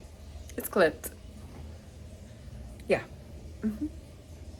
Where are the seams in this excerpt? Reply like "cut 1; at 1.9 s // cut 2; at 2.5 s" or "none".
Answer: none